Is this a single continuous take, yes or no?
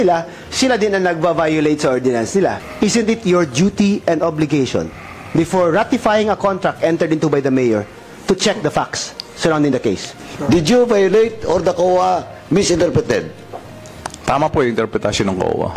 no